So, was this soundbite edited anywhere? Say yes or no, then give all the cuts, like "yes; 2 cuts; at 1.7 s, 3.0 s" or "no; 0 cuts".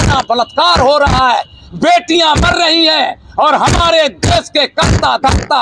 no; 0 cuts